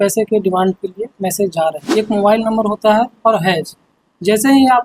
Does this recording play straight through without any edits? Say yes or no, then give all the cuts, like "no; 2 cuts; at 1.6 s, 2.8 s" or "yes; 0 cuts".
no; 1 cut; at 1.8 s